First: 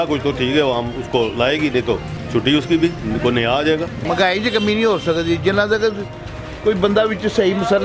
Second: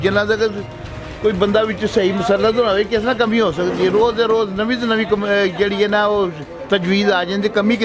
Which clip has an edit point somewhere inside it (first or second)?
first